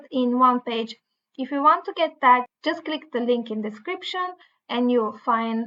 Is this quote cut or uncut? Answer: uncut